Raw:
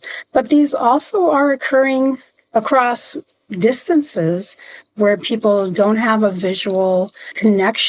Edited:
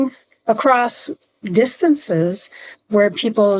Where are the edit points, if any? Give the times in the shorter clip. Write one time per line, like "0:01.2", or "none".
none